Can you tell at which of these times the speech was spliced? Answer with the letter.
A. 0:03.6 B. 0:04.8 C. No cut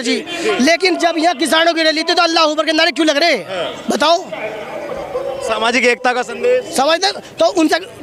C